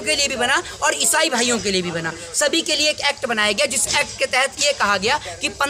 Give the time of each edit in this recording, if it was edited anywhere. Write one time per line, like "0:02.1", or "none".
none